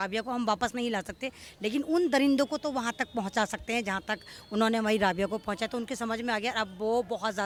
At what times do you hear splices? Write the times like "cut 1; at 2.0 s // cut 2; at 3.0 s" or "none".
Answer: none